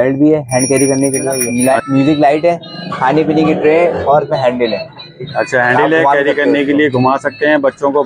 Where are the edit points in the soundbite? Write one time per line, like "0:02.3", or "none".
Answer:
0:01.5